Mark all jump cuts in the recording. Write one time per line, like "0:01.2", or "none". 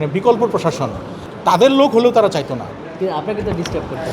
0:01.2